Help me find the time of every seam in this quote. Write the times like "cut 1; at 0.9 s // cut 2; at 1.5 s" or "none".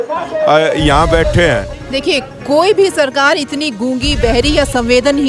cut 1; at 1.7 s